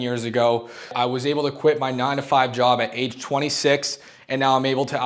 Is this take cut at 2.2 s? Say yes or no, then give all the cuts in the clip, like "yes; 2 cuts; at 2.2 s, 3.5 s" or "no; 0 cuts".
no; 1 cut; at 0.9 s